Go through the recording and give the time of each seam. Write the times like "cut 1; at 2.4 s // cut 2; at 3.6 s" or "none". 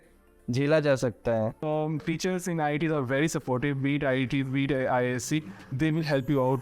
cut 1; at 1.6 s

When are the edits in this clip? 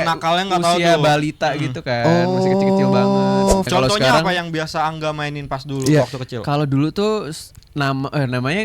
cut 1; at 3.7 s

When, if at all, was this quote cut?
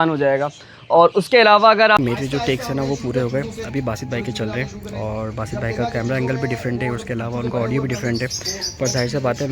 cut 1; at 2.0 s

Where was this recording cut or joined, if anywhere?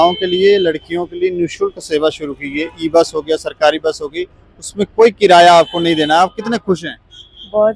none

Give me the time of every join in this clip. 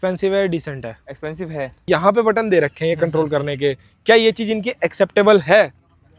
cut 1; at 1.8 s

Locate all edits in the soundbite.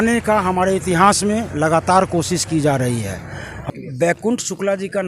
cut 1; at 3.6 s

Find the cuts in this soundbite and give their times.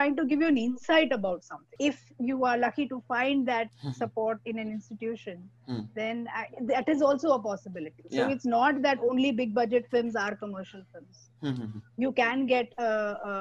cut 1; at 1.8 s

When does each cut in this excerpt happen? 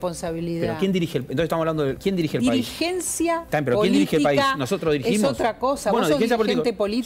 cut 1; at 2.0 s // cut 2; at 3.4 s

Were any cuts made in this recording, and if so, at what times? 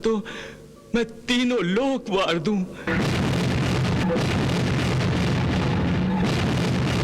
cut 1; at 2.9 s // cut 2; at 4.0 s

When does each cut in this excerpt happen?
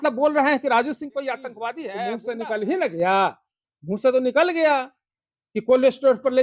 cut 1; at 1.8 s

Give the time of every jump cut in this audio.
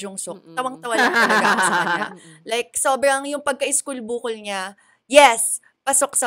none

